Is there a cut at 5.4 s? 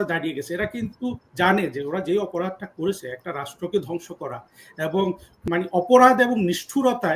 yes; 1 cut; at 5.4 s

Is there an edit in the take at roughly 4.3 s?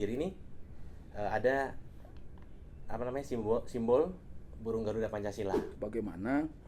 no; 1 cut; at 5.7 s

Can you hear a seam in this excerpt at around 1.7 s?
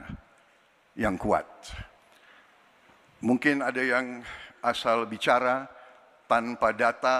no; 0 cuts

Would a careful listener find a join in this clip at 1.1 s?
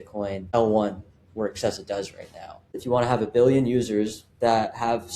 no; 1 cut; at 2.8 s

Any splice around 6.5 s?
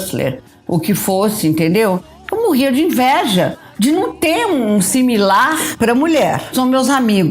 yes; 2 cuts; at 5.7 s, 6.5 s

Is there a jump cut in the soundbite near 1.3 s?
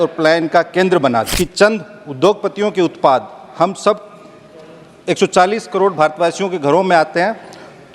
yes; 1 cut; at 1.3 s

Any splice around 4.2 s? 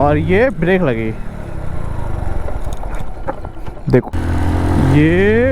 yes; 1 cut; at 4.2 s

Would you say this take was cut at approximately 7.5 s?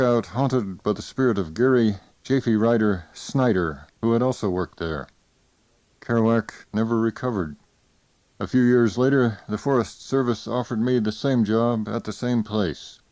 no; 1 cut; at 5.0 s

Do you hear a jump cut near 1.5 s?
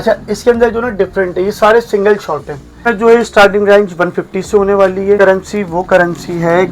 no; 2 cuts; at 2.8 s, 5.2 s

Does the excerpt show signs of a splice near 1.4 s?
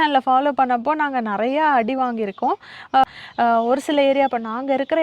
no; 1 cut; at 3.0 s

